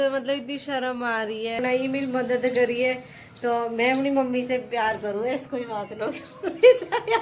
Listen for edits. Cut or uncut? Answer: cut